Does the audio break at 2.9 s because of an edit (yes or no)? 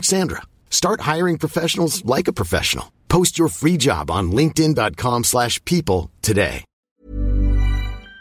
no